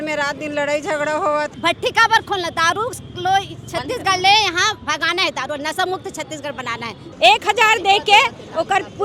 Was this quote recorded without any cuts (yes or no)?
no